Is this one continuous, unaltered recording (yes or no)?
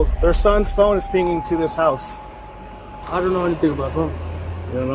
no